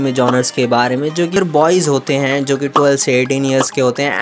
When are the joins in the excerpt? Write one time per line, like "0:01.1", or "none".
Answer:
0:01.4